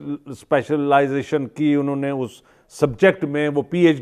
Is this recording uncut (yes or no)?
yes